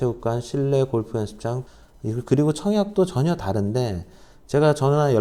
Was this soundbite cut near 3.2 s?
no; 1 cut; at 1.6 s

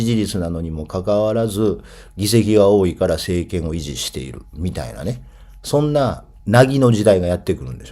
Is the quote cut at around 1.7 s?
no; 1 cut; at 6.3 s

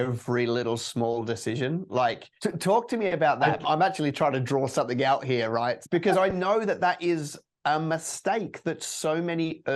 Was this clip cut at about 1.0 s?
no; 3 cuts; at 2.3 s, 3.6 s, 5.8 s

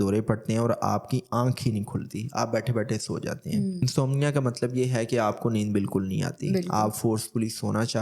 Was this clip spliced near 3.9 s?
yes; 1 cut; at 3.9 s

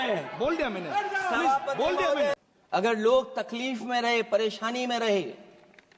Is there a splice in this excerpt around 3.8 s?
no; 1 cut; at 2.3 s

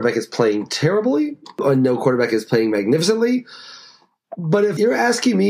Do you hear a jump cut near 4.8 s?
yes; 2 cuts; at 1.6 s, 4.8 s

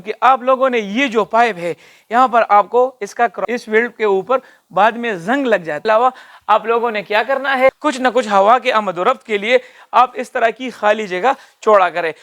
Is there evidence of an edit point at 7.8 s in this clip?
yes; 3 cuts; at 3.4 s, 5.8 s, 7.8 s

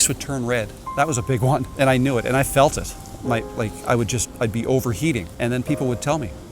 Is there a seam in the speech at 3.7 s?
no; 2 cuts; at 1.7 s, 5.3 s

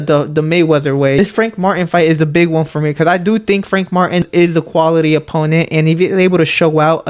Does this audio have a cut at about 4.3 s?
yes; 2 cuts; at 1.2 s, 4.3 s

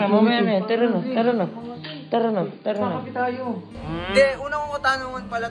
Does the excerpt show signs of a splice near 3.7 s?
yes; 1 cut; at 3.7 s

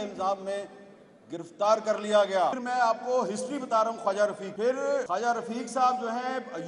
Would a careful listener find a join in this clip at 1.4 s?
no; 2 cuts; at 2.6 s, 4.9 s

